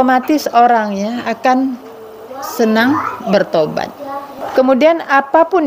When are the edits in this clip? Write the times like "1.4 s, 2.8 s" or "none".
4.4 s